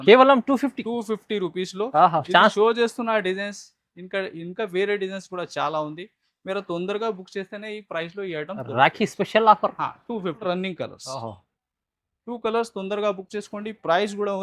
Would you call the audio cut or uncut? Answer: cut